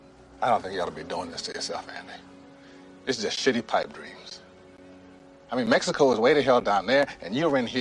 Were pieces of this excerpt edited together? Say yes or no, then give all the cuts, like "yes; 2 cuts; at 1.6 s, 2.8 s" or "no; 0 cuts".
yes; 1 cut; at 4.8 s